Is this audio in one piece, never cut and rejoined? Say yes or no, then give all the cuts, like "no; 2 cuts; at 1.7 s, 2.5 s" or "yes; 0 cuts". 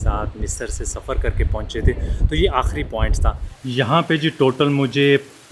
no; 1 cut; at 3.5 s